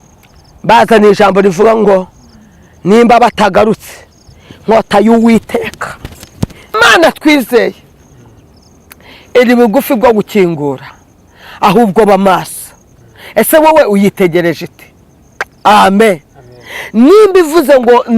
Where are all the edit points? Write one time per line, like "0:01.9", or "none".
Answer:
0:06.8